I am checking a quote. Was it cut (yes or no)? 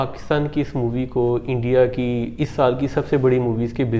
no